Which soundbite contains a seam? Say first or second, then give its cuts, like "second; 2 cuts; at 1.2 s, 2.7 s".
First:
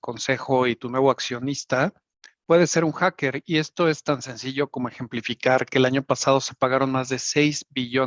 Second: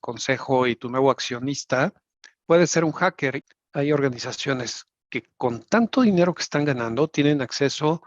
second; 1 cut; at 3.4 s